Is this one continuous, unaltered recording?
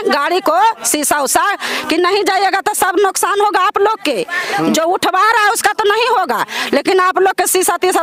yes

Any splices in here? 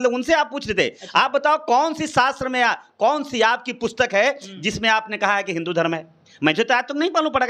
no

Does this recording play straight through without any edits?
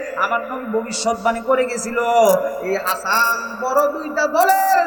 yes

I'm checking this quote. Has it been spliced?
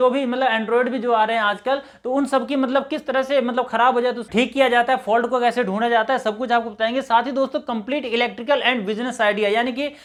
no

